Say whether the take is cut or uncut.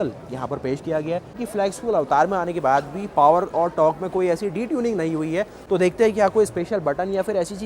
cut